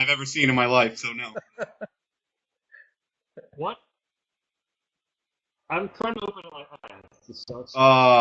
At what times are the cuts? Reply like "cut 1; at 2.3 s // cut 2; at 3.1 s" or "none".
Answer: cut 1; at 1.5 s